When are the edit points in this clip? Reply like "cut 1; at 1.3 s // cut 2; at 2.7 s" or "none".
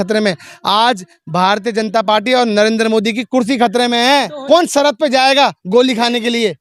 cut 1; at 4.4 s